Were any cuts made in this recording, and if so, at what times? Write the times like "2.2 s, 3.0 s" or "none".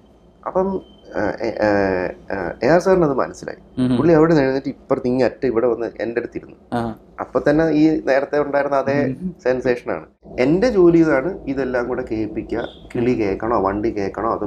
10.2 s